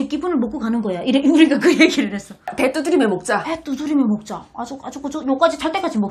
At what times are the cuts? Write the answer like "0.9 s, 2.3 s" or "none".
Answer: none